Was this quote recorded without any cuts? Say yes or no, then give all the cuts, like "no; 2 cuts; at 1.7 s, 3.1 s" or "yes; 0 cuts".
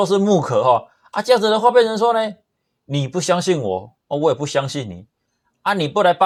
yes; 0 cuts